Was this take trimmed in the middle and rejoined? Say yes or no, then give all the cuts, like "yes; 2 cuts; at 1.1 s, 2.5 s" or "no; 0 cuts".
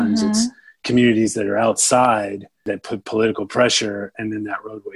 yes; 1 cut; at 2.6 s